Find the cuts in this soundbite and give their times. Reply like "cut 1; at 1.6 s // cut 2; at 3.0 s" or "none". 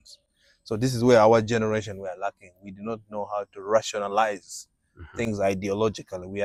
none